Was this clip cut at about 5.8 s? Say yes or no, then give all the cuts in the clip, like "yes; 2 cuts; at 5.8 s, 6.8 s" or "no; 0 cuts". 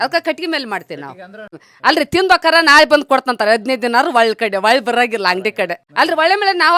yes; 2 cuts; at 1.7 s, 5.8 s